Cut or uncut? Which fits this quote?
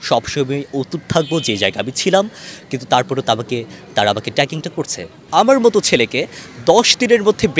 cut